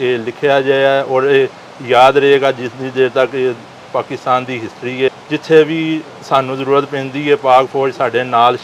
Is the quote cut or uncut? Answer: cut